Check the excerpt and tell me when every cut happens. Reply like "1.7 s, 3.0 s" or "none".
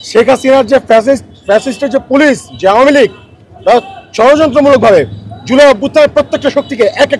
none